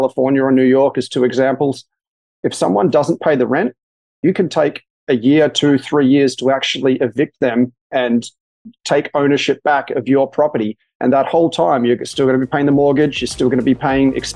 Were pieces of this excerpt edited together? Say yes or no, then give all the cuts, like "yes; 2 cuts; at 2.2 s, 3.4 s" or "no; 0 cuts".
no; 0 cuts